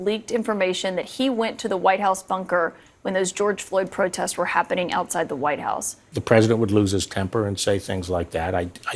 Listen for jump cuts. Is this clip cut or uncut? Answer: cut